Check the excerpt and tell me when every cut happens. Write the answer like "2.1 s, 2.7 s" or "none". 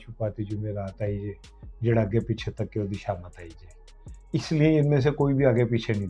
none